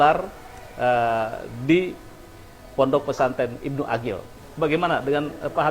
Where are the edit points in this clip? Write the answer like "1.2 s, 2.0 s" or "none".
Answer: 4.3 s

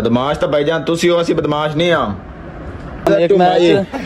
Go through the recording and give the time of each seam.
3.1 s

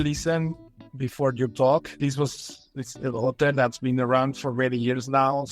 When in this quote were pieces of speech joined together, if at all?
1.9 s

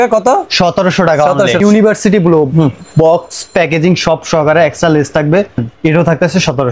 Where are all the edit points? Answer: 1.6 s, 5.7 s

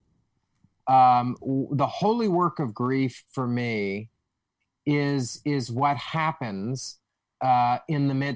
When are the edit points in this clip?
none

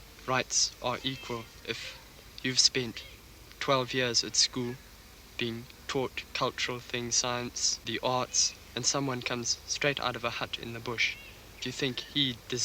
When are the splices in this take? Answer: 7.7 s

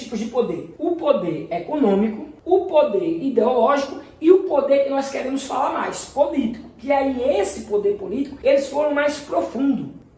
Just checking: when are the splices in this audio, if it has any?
8.3 s

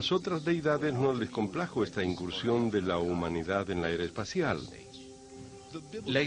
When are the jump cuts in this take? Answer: none

